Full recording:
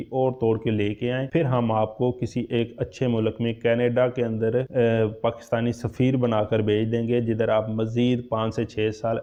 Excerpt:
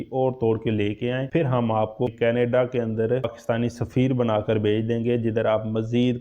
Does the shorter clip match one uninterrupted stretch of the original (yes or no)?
no